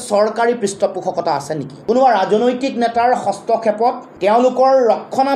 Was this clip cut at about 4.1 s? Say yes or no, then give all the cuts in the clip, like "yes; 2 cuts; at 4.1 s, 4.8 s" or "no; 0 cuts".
yes; 2 cuts; at 1.7 s, 4.1 s